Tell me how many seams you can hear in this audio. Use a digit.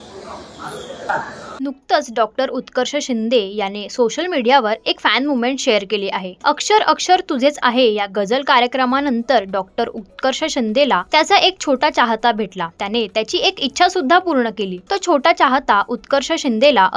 1